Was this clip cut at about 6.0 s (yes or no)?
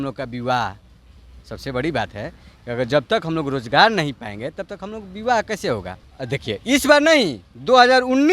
yes